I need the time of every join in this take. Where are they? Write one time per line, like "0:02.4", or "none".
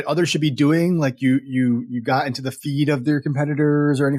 none